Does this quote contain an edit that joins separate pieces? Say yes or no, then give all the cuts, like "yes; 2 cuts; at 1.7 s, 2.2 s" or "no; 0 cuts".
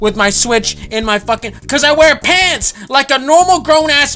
yes; 1 cut; at 2.7 s